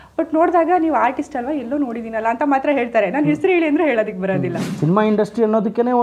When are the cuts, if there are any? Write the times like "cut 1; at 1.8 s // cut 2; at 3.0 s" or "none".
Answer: cut 1; at 4.6 s